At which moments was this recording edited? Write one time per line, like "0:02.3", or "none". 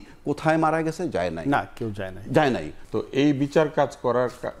0:02.7

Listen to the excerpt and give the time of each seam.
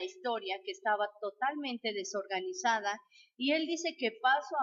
none

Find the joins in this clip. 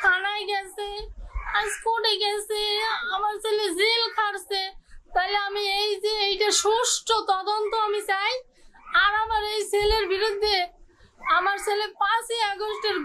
none

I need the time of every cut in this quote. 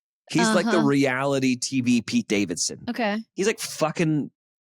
0:03.2

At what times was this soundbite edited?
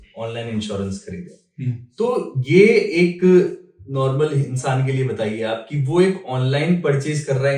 none

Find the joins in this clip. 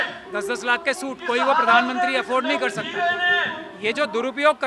none

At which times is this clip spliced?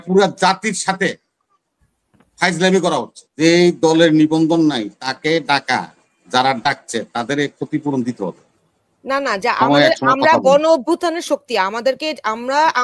0:03.4

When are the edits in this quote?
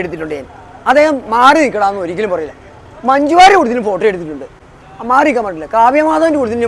none

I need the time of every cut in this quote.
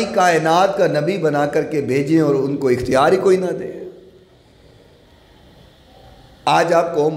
none

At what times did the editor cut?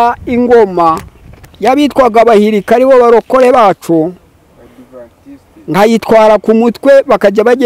none

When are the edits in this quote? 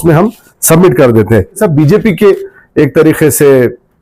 0:01.6

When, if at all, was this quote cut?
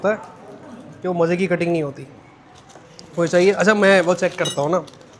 none

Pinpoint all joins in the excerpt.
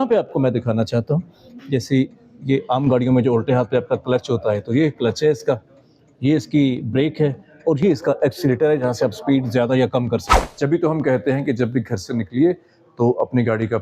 0:10.4

